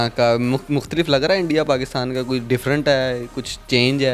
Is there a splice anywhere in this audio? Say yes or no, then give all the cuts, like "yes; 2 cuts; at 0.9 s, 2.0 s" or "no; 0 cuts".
no; 0 cuts